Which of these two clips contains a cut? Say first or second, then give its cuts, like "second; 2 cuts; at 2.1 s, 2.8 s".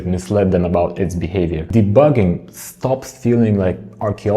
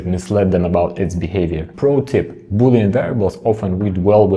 first; 1 cut; at 1.6 s